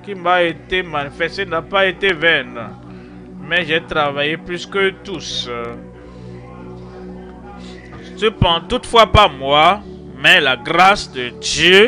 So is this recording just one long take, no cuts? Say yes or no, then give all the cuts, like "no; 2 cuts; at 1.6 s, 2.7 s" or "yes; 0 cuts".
yes; 0 cuts